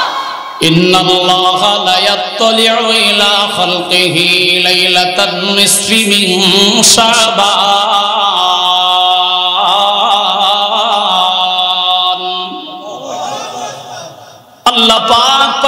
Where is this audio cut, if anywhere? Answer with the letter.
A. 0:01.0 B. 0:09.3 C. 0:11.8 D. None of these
D